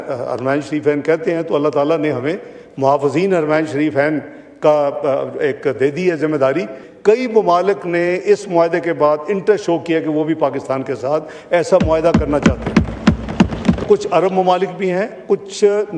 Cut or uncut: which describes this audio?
cut